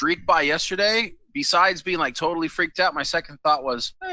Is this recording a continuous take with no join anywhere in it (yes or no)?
yes